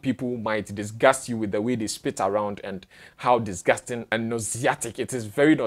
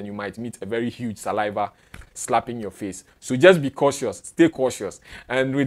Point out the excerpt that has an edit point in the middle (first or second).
first